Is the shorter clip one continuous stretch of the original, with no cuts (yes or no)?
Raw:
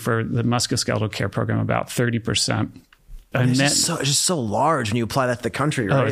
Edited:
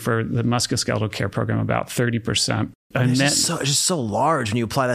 no